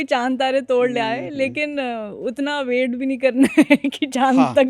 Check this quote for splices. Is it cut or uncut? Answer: uncut